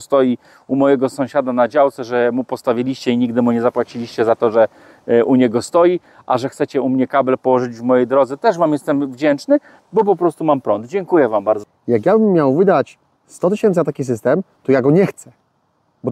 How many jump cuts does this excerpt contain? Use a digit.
1